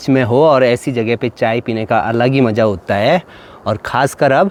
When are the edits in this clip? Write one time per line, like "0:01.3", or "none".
none

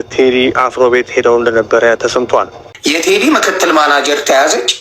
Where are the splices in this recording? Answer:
0:02.6

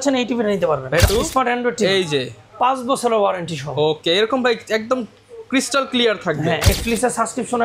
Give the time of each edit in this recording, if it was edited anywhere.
0:01.0
0:06.7

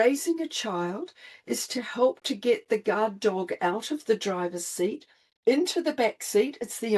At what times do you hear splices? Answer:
none

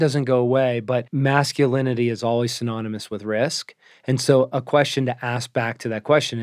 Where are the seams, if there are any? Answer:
0:01.1

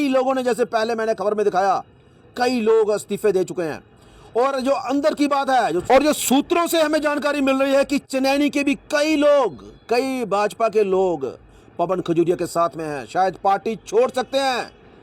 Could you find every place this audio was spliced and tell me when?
none

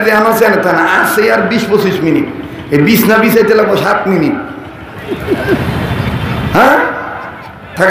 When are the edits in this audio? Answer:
none

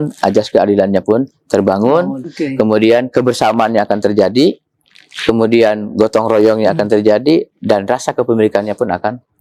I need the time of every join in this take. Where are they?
none

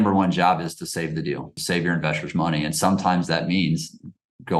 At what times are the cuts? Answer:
0:01.5

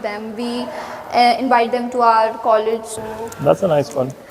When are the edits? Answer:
0:03.1

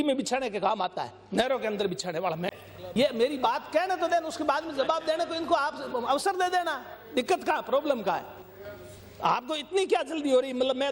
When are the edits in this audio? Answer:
0:02.4

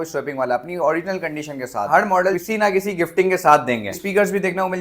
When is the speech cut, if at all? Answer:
0:01.9
0:04.0

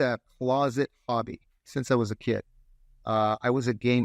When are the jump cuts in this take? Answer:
none

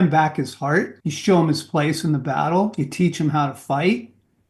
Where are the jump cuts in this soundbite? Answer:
0:01.0

